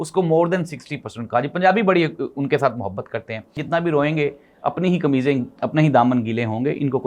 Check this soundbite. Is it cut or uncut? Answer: cut